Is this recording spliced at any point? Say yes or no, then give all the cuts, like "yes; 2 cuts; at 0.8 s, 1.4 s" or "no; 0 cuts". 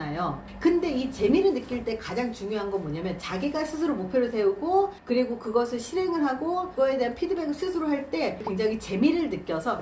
yes; 2 cuts; at 6.7 s, 8.5 s